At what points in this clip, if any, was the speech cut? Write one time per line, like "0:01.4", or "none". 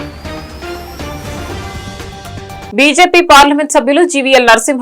0:02.7